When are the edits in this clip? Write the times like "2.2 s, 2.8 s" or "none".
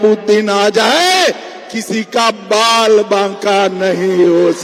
none